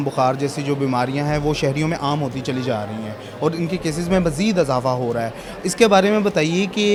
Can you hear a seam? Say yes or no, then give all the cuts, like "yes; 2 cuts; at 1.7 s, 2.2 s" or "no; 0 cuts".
no; 0 cuts